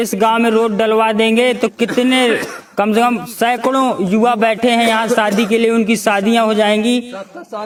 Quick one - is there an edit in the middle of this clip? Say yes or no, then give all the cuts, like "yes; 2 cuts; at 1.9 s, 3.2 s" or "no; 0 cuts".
no; 0 cuts